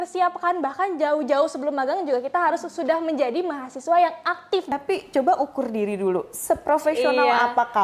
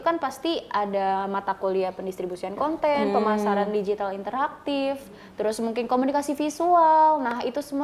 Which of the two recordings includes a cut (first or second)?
first